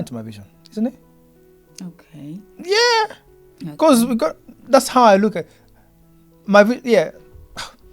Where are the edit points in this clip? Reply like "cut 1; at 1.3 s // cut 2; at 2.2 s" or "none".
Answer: none